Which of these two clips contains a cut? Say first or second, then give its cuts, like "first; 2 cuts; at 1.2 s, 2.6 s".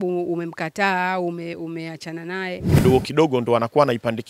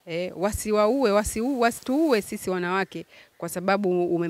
first; 1 cut; at 2.7 s